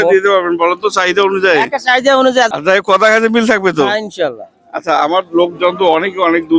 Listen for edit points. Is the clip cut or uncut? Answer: cut